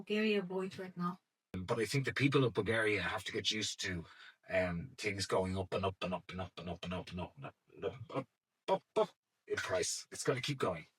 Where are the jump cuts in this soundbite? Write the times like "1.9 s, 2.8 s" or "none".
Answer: 1.6 s